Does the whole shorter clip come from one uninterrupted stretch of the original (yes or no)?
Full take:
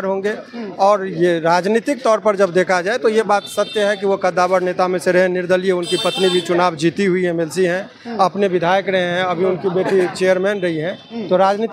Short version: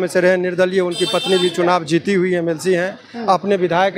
yes